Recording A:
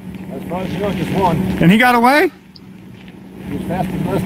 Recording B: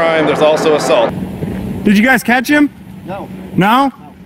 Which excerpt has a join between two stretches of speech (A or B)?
B